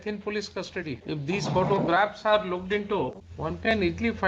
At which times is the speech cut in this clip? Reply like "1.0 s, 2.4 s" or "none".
1.0 s, 3.3 s